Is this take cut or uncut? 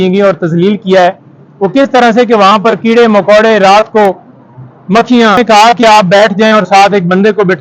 cut